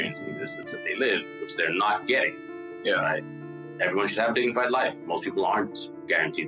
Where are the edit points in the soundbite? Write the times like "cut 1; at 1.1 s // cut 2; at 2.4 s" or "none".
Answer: cut 1; at 3.6 s